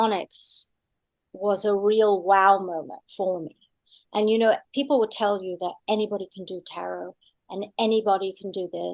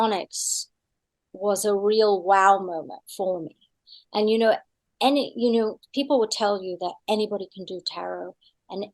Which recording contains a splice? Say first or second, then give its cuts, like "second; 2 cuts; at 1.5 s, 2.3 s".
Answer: first; 1 cut; at 4.7 s